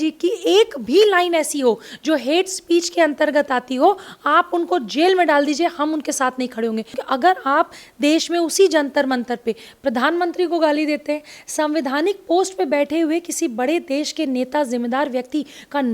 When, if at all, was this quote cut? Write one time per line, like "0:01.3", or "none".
0:06.9